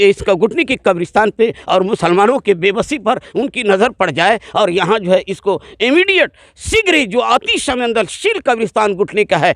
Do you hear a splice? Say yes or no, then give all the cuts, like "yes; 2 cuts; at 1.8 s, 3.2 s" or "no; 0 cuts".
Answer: no; 0 cuts